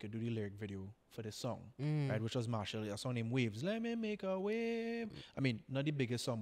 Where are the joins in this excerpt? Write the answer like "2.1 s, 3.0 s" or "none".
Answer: none